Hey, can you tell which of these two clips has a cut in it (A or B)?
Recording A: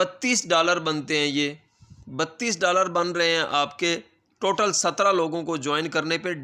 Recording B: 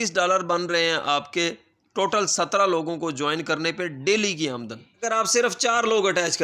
B